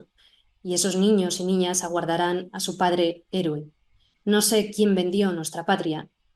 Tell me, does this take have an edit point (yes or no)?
no